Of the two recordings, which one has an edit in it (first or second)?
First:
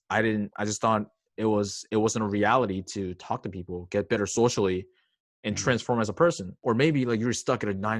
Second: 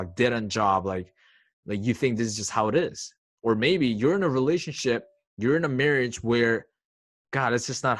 first